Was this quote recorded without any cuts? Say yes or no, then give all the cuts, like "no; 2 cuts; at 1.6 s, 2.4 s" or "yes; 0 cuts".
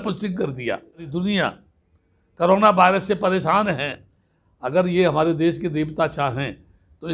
no; 1 cut; at 1.1 s